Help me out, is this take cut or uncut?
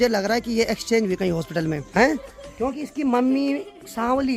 uncut